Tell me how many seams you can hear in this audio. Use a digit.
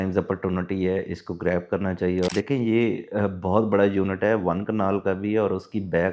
1